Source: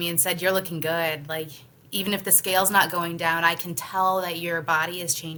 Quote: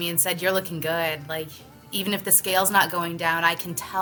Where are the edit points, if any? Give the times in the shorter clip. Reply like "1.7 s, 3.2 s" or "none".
none